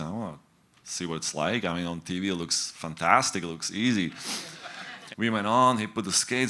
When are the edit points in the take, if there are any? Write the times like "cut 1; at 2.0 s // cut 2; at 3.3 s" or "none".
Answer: cut 1; at 4.6 s